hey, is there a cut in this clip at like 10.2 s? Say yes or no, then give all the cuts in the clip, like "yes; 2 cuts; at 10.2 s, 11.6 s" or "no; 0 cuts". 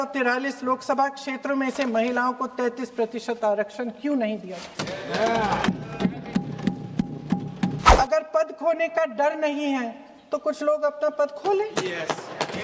no; 1 cut; at 7.9 s